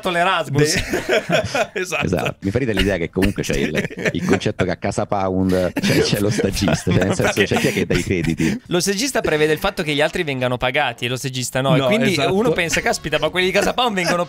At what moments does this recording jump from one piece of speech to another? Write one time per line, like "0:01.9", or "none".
0:02.4
0:05.8
0:08.6